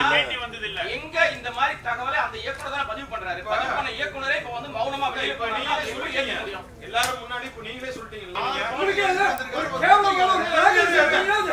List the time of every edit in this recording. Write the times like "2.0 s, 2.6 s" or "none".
8.3 s